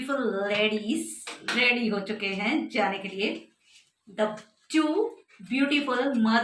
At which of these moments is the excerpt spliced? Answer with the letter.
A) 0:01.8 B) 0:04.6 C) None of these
C